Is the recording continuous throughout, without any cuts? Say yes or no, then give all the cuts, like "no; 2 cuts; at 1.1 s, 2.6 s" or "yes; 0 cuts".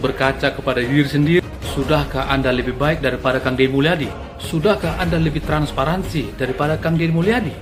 yes; 0 cuts